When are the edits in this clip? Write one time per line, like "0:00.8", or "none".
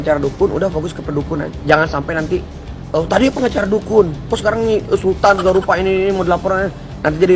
none